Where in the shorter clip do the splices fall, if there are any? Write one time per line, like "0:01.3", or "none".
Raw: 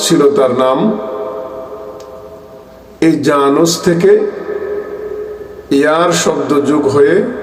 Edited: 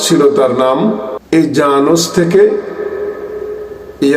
0:01.1